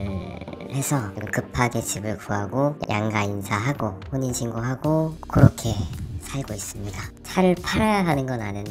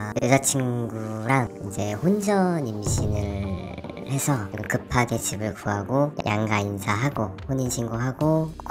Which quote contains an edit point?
first; 1 cut; at 7.1 s

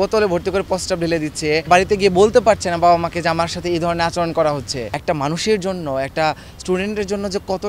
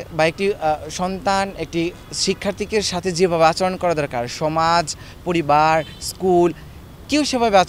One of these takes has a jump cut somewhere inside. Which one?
first; 2 cuts; at 1.7 s, 4.9 s

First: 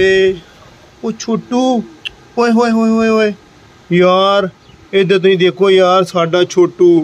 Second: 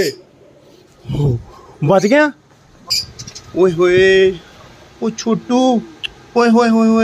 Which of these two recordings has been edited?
second; 1 cut; at 3.0 s

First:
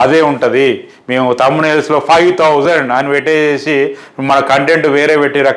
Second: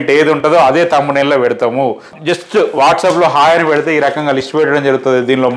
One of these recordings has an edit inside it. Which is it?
second; 1 cut; at 2.1 s

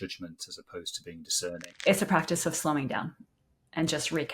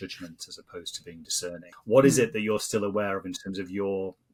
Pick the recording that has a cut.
first; 1 cut; at 1.7 s

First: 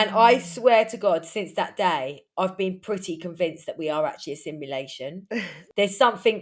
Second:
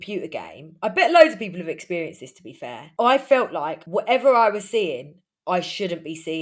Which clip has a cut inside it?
first; 1 cut; at 5.4 s

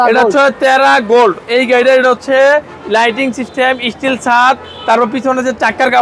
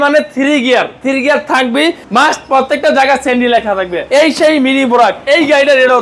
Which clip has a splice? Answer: second; 2 cuts; at 2.0 s, 4.0 s

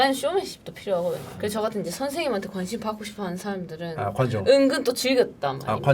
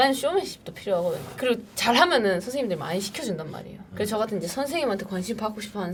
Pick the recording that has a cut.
first; 1 cut; at 1.3 s

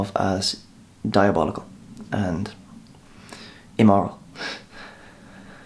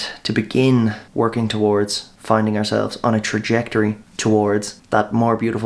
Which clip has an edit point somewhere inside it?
second; 4 cuts; at 1.0 s, 2.1 s, 4.1 s, 4.8 s

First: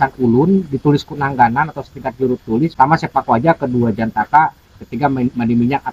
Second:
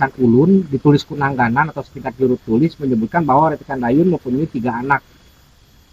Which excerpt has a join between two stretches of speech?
first; 1 cut; at 2.7 s

